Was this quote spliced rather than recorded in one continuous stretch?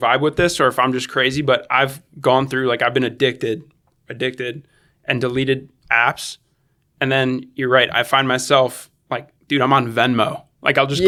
no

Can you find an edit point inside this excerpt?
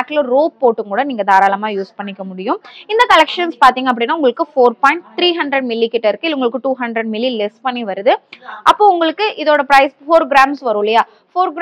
no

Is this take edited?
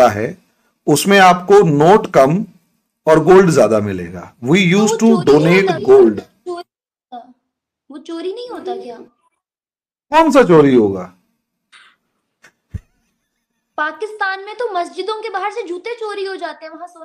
no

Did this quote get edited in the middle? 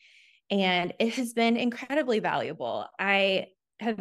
no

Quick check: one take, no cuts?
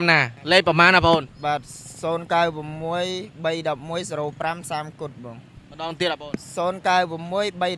yes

